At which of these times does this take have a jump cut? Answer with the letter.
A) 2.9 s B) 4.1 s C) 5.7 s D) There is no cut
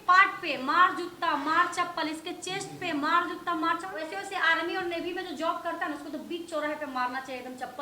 B